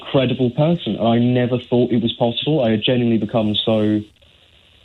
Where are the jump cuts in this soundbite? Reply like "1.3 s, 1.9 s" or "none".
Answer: none